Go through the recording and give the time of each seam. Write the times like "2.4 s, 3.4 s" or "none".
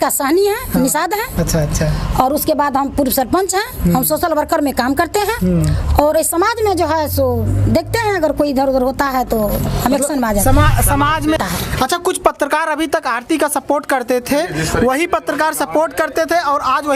11.4 s